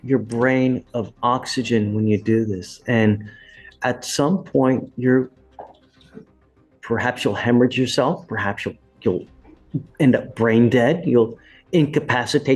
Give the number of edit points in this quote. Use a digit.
0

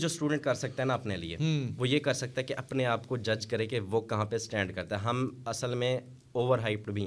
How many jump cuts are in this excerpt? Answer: 0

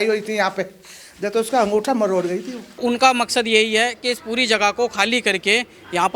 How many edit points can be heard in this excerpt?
1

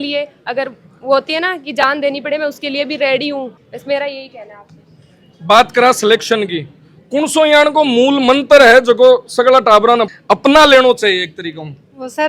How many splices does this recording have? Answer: 0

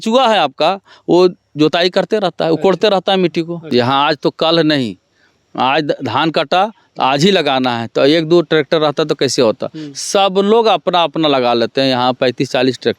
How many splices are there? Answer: 1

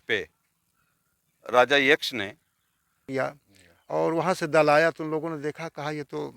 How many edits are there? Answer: 1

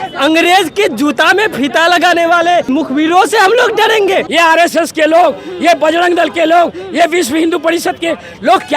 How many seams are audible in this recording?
2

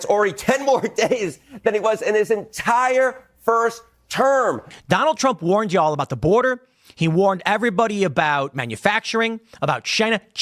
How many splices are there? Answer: 1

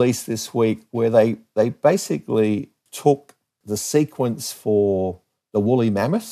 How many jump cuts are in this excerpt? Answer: 2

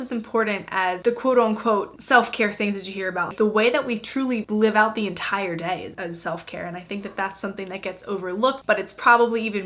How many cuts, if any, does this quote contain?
4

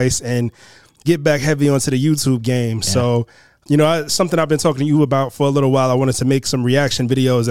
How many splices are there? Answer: 1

